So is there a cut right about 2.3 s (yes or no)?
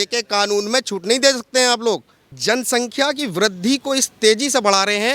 yes